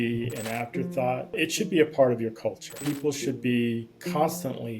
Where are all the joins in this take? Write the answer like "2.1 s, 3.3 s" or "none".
1.4 s, 2.7 s